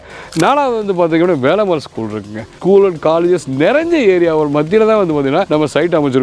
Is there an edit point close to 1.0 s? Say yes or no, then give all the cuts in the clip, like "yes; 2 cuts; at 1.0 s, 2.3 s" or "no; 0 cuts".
no; 2 cuts; at 2.6 s, 5.5 s